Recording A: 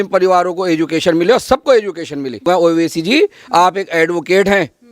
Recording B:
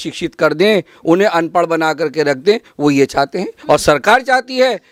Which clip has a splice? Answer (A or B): A